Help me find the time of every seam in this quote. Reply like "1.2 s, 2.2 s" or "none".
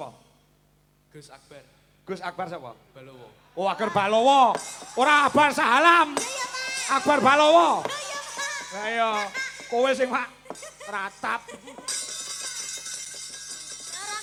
none